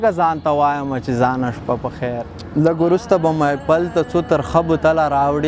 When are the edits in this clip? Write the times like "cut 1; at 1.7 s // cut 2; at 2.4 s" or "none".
cut 1; at 2.3 s